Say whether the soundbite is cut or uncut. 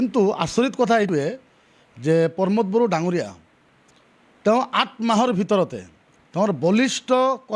cut